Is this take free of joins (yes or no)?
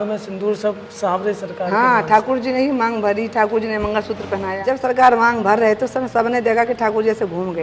no